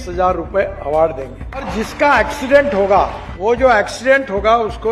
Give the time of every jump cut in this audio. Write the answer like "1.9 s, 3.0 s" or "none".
1.7 s, 3.2 s

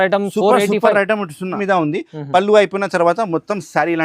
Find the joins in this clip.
1.6 s

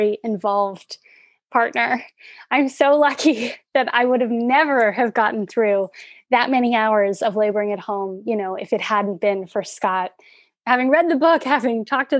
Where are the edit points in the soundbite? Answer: none

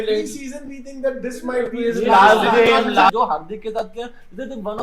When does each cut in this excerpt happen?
3.1 s

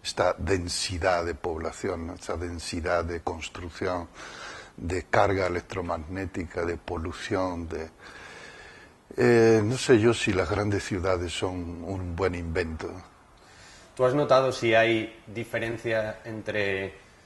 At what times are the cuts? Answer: 15.2 s

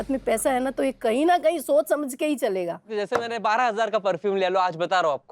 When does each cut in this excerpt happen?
2.9 s

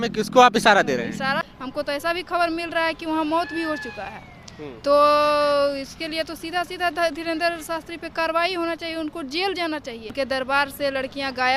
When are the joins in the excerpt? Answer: 1.4 s, 10.1 s

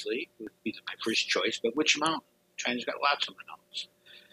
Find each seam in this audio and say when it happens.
none

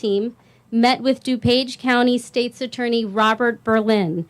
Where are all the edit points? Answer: 1.7 s

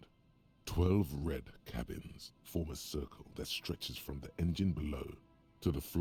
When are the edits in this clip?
none

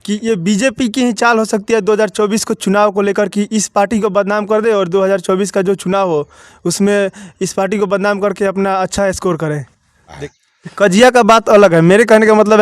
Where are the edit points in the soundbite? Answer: 10.2 s

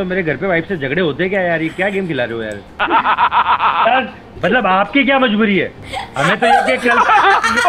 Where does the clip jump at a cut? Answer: 4.3 s

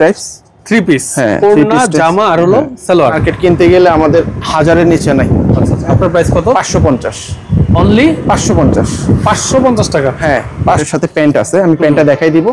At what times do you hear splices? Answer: 3.2 s, 10.8 s

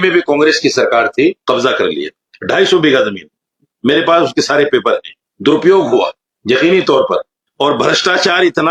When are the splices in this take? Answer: none

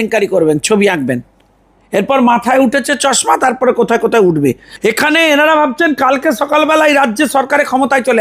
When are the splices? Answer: 4.7 s

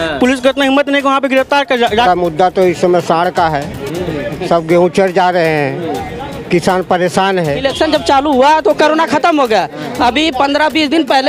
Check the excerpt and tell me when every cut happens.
2.0 s, 7.6 s

